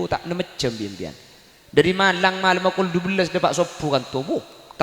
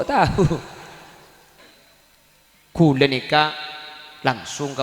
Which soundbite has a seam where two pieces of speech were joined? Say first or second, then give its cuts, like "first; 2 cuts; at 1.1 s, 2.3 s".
second; 1 cut; at 1.6 s